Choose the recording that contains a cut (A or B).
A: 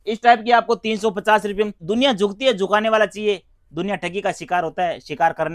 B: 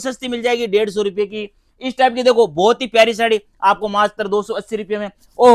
A